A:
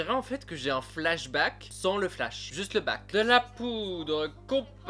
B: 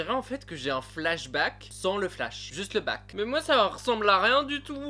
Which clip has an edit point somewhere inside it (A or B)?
B